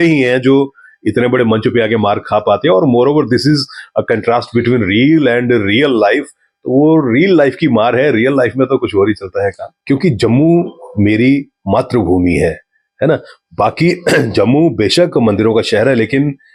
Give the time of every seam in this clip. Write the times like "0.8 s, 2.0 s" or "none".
9.7 s

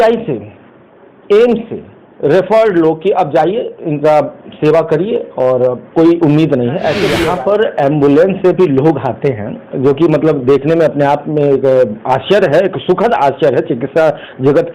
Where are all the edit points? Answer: 7.1 s

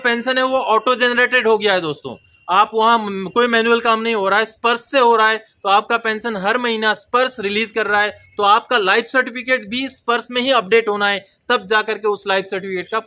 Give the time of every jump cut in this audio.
none

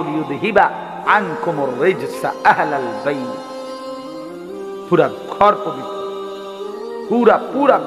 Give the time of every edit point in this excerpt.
none

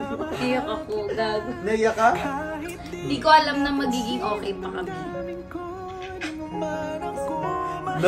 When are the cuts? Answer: none

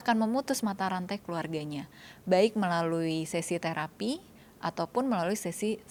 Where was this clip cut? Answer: none

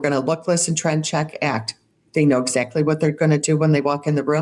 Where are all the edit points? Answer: 1.9 s

